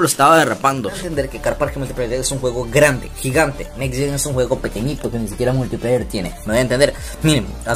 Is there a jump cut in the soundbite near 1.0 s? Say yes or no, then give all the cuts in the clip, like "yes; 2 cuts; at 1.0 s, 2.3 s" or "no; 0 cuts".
yes; 1 cut; at 1.0 s